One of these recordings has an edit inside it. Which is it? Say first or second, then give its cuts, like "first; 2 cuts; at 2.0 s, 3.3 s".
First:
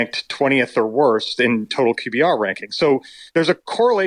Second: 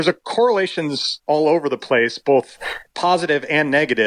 first; 1 cut; at 1.7 s